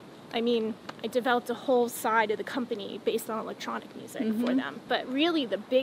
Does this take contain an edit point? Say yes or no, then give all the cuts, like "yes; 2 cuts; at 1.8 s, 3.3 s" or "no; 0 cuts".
yes; 1 cut; at 4.8 s